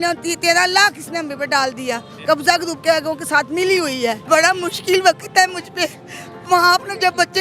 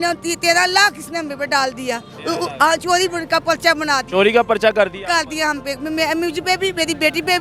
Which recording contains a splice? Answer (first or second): first